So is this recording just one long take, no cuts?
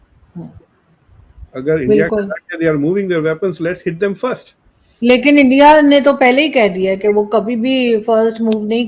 yes; 0 cuts

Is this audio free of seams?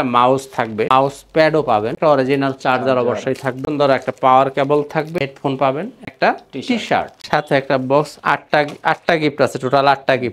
yes; 0 cuts

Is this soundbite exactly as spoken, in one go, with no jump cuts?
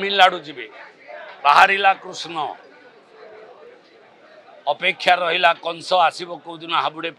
yes; 0 cuts

